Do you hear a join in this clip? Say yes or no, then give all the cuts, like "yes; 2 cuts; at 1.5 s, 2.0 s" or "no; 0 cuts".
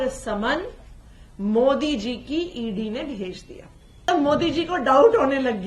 yes; 1 cut; at 4.1 s